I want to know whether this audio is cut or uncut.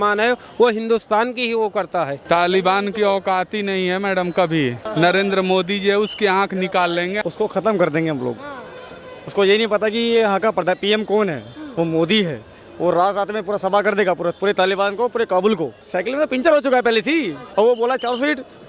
cut